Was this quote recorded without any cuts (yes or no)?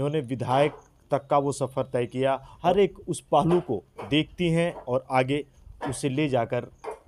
no